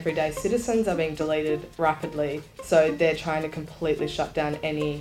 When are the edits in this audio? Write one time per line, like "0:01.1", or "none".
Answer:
0:01.7